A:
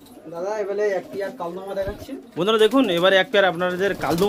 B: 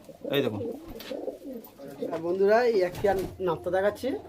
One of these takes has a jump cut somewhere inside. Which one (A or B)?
B